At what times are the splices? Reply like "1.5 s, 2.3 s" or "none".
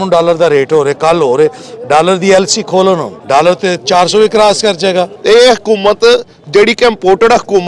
3.1 s, 5.1 s